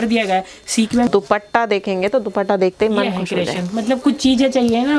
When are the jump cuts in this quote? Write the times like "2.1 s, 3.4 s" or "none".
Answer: 1.1 s